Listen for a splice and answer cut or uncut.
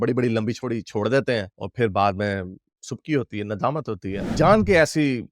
cut